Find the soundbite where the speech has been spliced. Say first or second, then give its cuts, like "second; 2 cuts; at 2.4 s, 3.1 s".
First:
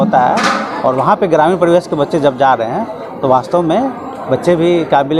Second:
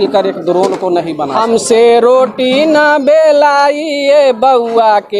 second; 1 cut; at 1.3 s